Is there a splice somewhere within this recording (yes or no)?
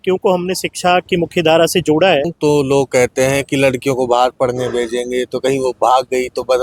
yes